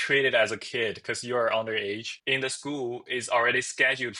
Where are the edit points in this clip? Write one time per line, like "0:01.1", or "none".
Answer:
0:02.1